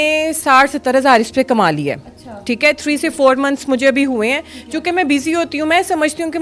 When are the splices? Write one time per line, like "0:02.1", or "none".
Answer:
none